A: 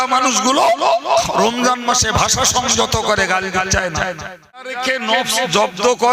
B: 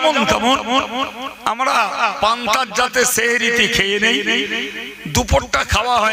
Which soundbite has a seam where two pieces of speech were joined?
A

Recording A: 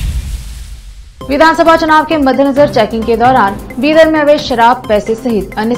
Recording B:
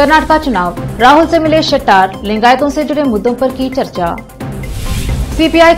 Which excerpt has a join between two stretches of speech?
A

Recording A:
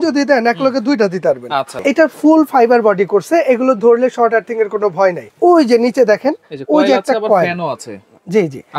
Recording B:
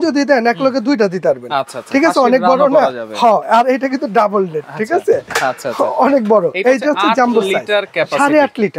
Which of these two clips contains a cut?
A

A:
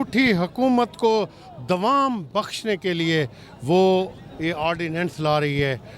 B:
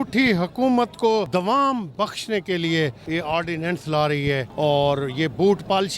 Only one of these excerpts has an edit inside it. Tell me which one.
B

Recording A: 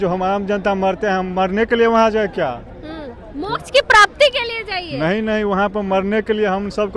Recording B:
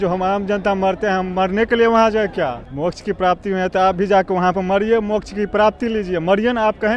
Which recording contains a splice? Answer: B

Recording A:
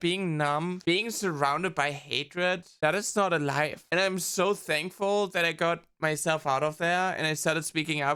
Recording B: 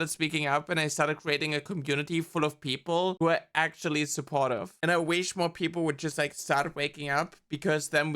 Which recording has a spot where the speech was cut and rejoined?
B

